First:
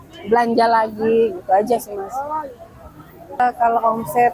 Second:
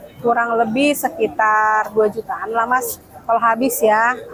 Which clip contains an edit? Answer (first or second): first